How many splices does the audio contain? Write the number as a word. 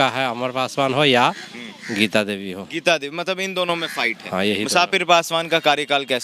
zero